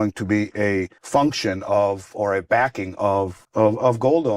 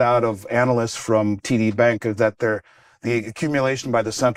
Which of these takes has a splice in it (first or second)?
first